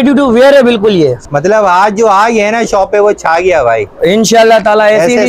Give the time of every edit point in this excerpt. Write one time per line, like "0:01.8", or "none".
0:01.2